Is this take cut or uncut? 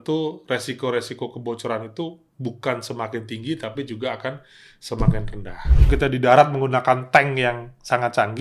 cut